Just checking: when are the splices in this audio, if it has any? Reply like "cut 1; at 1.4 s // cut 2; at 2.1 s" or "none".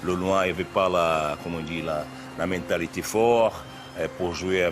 none